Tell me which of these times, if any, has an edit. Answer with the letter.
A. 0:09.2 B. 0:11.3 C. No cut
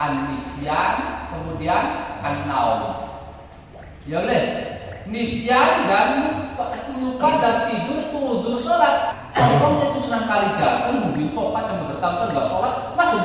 A